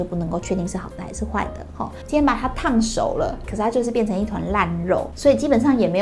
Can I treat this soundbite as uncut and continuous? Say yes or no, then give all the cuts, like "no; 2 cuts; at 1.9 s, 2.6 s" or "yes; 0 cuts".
no; 3 cuts; at 2.0 s, 3.5 s, 5.1 s